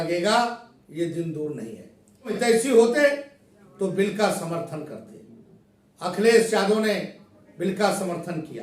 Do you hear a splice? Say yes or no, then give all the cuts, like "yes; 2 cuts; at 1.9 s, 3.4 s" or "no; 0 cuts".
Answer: yes; 1 cut; at 2.4 s